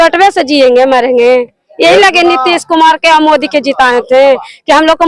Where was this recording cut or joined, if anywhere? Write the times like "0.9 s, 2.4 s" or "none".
none